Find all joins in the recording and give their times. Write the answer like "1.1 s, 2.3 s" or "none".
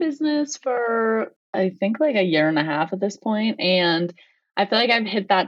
1.5 s